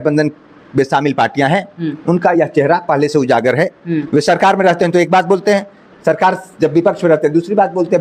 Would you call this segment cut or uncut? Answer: uncut